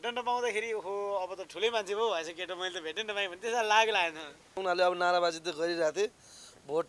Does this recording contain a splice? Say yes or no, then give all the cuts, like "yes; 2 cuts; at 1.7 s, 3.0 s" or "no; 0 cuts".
yes; 1 cut; at 4.6 s